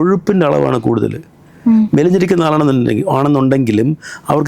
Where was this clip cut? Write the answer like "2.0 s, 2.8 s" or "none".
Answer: none